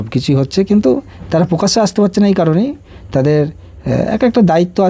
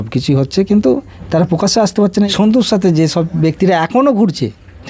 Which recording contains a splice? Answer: second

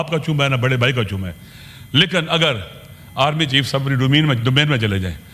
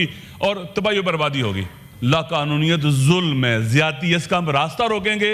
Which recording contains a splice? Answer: second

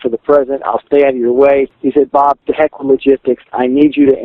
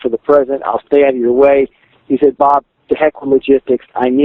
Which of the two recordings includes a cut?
first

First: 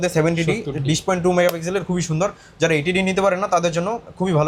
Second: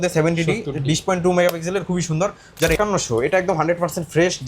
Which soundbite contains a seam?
second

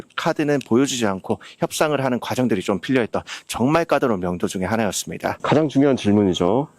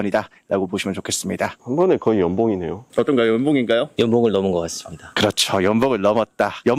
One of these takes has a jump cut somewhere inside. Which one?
first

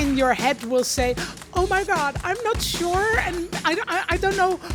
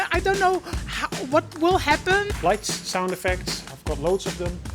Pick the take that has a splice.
second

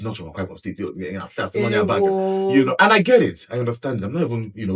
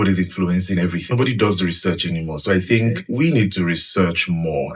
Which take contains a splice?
second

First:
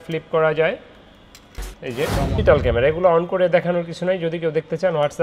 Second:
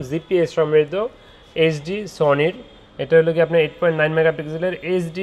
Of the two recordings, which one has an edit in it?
first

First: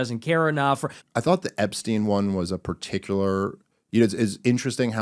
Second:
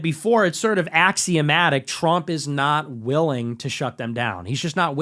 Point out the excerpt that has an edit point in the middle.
first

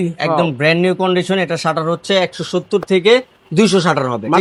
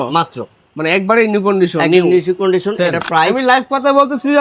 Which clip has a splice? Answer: second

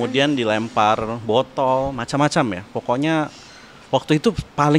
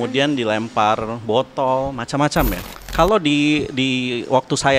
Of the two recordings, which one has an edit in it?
second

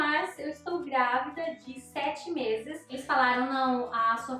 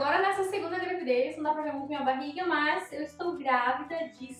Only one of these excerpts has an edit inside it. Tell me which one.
first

